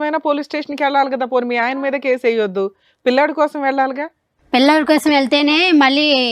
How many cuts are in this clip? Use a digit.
0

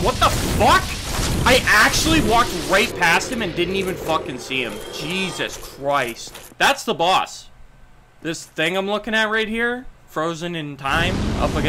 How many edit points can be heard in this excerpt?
1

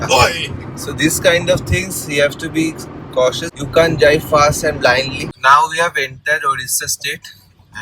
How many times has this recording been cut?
2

